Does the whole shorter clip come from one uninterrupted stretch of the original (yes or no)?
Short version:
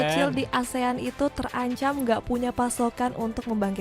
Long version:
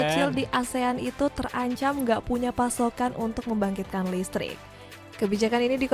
yes